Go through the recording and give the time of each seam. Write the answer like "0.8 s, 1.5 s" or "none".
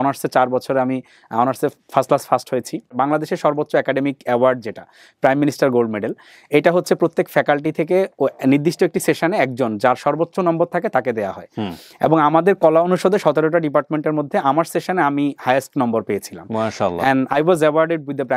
2.9 s